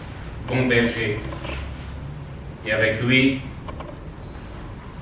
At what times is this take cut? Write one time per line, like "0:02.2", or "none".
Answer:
none